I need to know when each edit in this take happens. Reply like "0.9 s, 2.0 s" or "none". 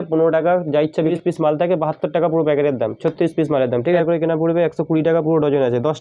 1.1 s, 4.0 s